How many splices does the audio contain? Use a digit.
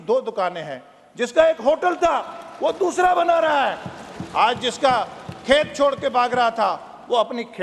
0